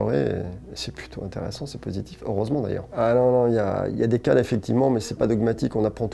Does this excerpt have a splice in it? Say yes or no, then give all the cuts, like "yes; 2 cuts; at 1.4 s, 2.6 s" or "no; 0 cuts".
no; 0 cuts